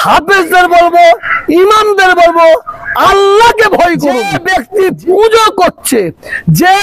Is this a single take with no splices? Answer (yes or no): no